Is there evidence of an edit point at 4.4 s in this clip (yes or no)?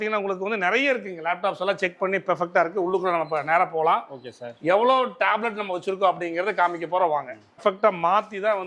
no